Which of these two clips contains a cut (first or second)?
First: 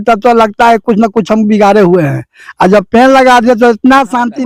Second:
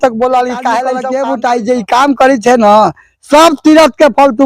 second